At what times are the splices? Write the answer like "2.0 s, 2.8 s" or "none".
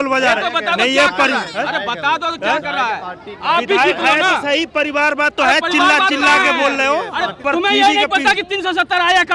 7.4 s